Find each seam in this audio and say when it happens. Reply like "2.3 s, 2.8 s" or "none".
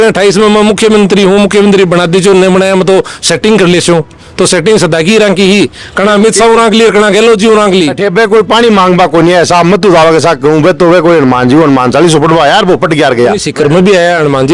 8.0 s, 13.4 s